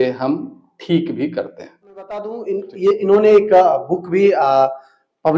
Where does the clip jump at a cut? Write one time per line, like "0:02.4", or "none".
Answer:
0:02.2

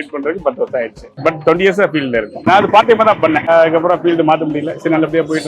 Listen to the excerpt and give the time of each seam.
0:02.4
0:03.4

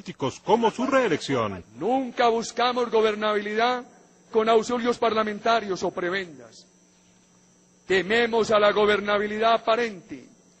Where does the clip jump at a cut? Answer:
0:06.6

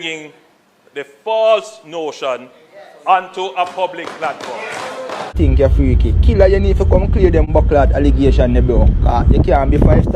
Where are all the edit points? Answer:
0:05.3
0:07.5

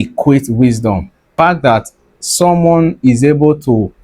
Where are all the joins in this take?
0:01.3

